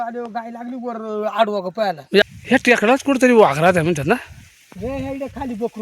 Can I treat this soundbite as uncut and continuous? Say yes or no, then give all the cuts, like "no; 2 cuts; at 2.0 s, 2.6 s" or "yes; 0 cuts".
no; 1 cut; at 2.2 s